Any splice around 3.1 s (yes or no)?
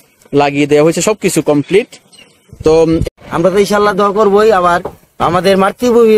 yes